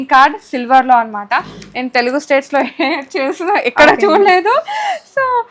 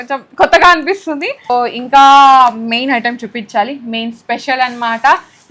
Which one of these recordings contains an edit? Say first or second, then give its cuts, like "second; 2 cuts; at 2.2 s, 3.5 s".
second; 1 cut; at 1.5 s